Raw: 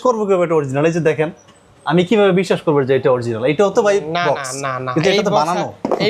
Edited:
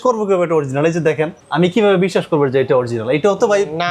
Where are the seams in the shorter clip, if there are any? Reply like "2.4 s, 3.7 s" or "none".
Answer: 1.4 s